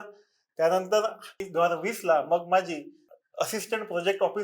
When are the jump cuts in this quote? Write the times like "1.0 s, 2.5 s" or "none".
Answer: 1.4 s, 3.0 s